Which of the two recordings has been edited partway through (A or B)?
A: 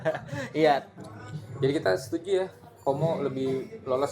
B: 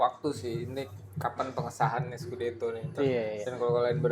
A